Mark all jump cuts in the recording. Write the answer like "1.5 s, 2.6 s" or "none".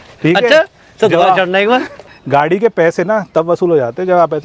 2.1 s